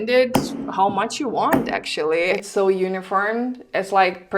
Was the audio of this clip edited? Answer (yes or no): yes